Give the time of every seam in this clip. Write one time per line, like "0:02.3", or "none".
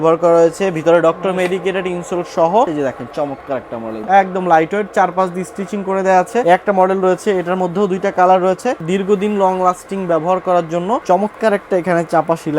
0:02.7
0:04.0
0:06.4
0:08.8
0:11.0